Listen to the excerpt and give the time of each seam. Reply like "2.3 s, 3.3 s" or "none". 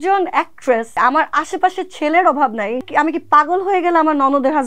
0.9 s, 2.9 s